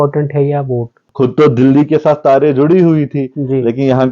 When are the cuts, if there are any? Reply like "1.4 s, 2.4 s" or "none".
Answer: 1.0 s